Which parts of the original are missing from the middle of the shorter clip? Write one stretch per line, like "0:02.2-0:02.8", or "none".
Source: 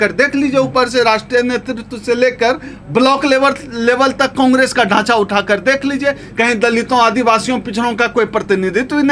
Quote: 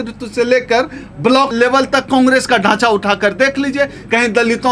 0:03.2-0:03.8